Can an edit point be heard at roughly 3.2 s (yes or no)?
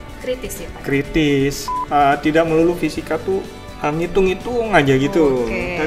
no